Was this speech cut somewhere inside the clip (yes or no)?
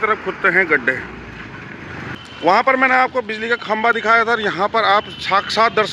yes